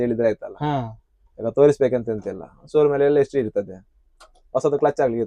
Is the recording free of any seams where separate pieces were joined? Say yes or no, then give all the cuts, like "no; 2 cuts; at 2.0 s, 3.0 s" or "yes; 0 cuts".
yes; 0 cuts